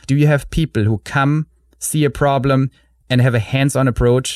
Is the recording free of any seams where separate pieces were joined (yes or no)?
yes